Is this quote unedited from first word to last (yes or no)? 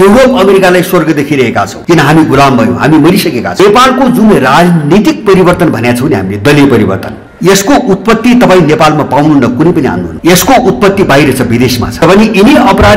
no